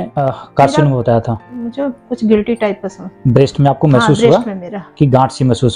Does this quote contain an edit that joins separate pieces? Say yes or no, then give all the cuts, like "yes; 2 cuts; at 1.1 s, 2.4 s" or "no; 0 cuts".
yes; 1 cut; at 1.4 s